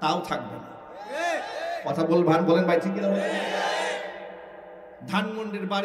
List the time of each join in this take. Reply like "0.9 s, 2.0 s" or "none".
none